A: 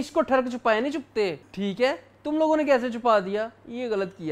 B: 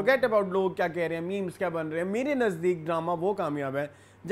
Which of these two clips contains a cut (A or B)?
A